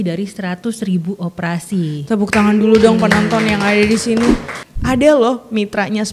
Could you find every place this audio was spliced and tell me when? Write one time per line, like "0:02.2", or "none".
0:04.6